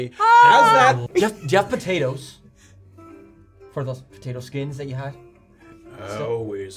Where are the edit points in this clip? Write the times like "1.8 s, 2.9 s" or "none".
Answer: 1.0 s